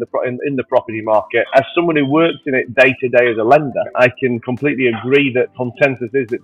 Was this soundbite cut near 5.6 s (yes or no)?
yes